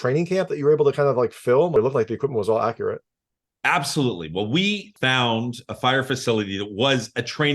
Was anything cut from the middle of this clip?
yes; 2 cuts; at 1.8 s, 4.9 s

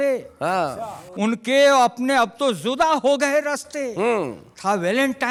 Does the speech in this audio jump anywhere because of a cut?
no; 0 cuts

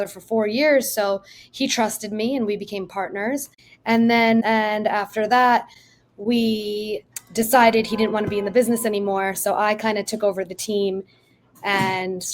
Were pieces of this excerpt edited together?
yes; 1 cut; at 4.4 s

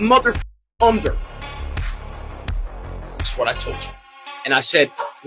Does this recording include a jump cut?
no; 0 cuts

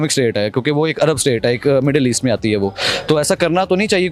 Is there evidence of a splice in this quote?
no; 0 cuts

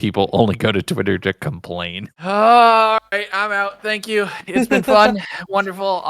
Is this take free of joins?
no; 1 cut; at 1.9 s

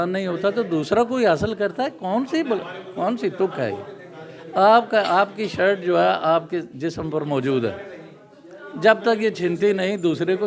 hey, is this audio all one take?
yes; 0 cuts

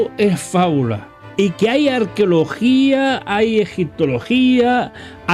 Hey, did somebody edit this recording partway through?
no; 0 cuts

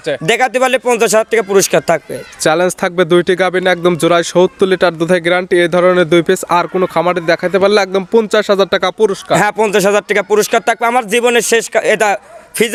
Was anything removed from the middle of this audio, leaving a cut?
no; 0 cuts

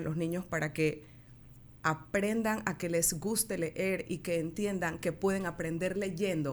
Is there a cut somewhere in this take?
no; 0 cuts

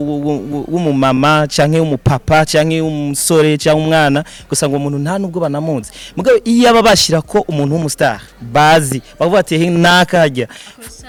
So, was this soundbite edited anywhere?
no; 0 cuts

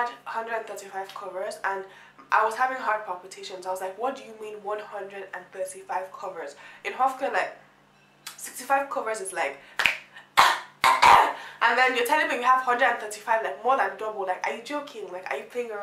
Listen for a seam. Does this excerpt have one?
no; 0 cuts

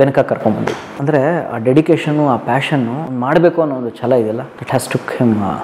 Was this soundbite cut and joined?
yes; 3 cuts; at 0.9 s, 3.1 s, 4.5 s

